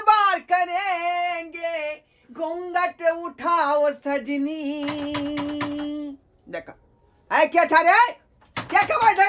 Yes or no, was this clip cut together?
no